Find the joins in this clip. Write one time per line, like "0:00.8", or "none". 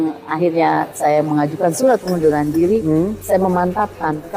0:00.9
0:03.2